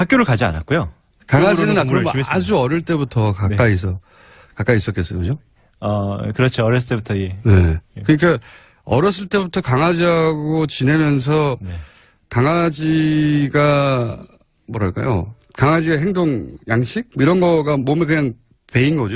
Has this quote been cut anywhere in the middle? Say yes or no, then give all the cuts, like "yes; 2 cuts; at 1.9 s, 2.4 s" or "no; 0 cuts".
no; 0 cuts